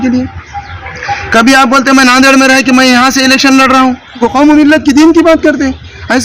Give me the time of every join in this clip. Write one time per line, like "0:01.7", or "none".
0:04.2